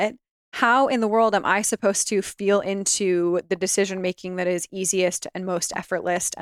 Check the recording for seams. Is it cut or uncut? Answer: uncut